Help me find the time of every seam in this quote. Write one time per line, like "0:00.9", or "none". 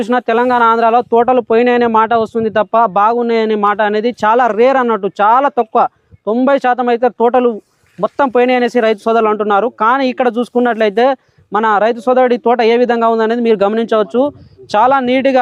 none